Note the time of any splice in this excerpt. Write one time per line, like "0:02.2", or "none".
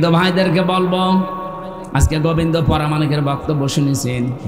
none

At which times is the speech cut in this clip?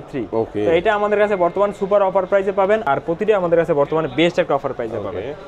0:02.9

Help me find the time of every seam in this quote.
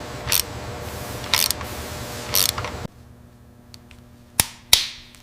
0:02.9

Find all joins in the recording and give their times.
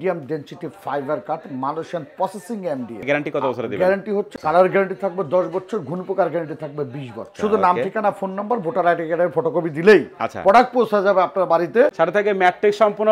0:03.0
0:04.3
0:07.3
0:11.9

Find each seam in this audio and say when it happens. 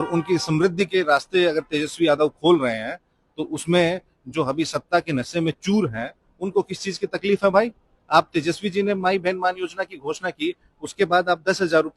0:07.9

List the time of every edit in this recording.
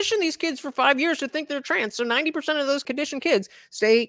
0:02.8

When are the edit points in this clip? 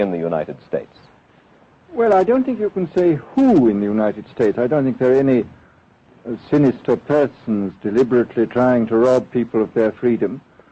0:01.3

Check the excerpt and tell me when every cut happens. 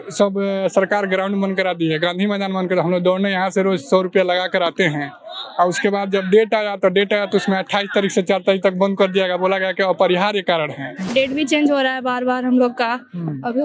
0:11.0

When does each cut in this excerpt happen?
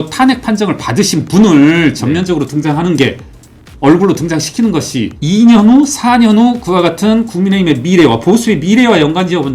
0:05.1

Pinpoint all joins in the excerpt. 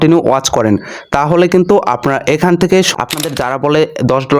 0:02.9

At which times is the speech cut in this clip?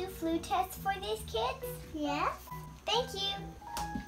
none

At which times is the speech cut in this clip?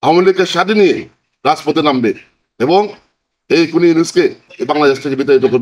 none

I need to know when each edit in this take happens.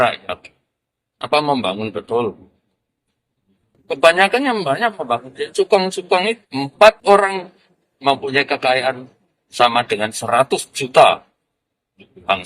0:06.5

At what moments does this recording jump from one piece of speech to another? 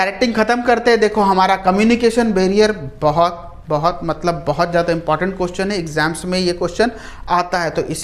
none

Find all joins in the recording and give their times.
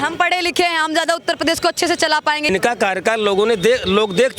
0:02.5

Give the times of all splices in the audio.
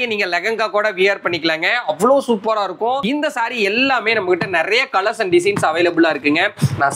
0:03.0

